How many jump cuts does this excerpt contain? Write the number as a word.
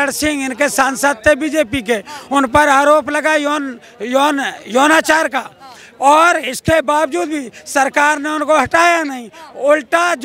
zero